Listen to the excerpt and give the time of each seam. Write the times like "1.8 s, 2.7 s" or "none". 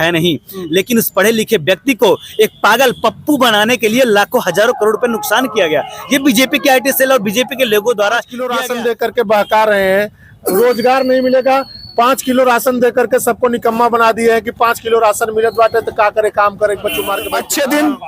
8.5 s, 17.2 s

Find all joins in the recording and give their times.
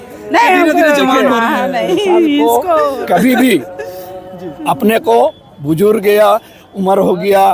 none

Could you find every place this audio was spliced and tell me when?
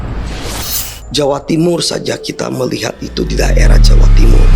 1.0 s

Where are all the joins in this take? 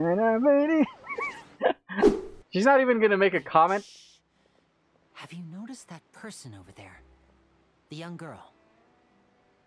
2.1 s

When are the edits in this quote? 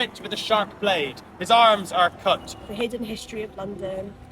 2.6 s

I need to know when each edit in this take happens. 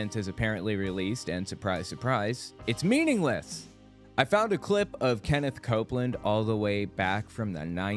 3.9 s

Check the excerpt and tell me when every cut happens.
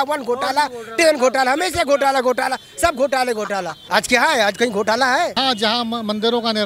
3.8 s, 5.4 s

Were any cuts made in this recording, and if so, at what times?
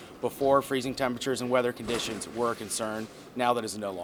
none

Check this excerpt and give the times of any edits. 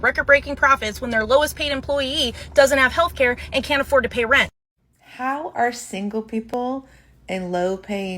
4.5 s

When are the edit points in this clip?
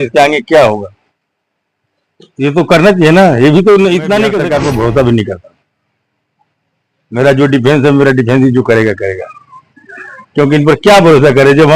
4.3 s

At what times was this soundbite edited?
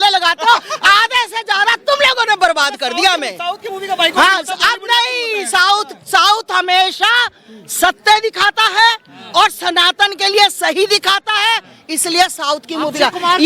none

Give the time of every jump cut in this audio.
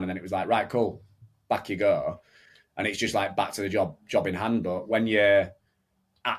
none

